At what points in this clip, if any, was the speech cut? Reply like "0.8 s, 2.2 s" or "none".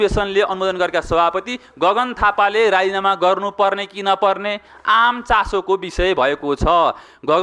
none